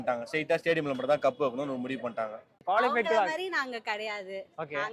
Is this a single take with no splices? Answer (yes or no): no